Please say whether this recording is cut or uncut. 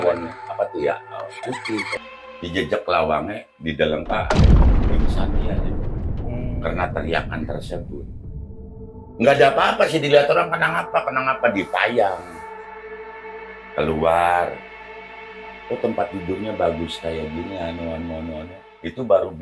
cut